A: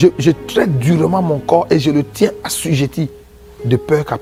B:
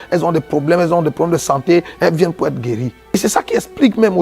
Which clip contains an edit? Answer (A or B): B